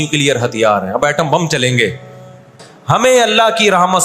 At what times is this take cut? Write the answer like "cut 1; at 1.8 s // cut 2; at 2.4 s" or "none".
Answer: cut 1; at 2.7 s